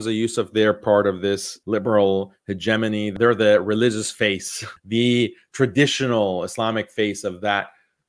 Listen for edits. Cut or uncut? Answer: cut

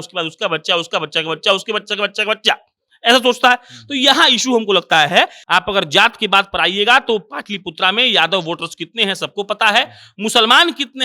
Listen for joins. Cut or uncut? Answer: cut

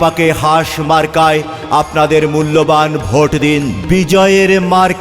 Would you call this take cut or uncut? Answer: cut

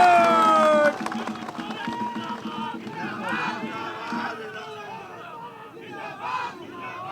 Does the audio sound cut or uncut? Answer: uncut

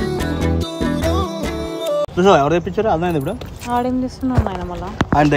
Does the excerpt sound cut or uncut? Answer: uncut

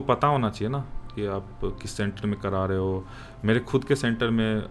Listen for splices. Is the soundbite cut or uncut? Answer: uncut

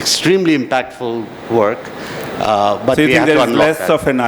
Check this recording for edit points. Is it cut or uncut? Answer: uncut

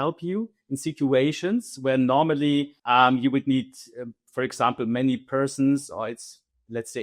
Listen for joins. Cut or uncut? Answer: uncut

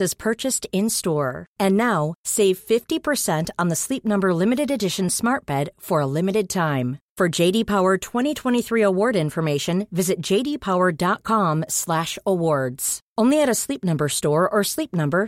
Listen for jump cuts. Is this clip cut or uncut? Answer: uncut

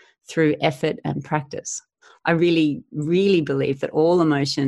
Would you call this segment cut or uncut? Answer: cut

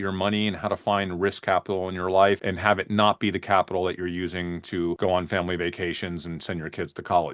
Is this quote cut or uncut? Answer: cut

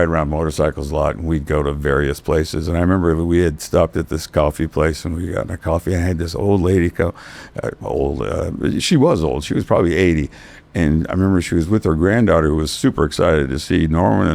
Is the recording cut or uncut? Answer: uncut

